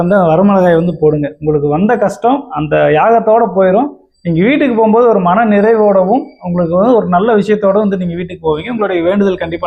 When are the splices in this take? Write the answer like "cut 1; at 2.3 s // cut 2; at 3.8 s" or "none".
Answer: none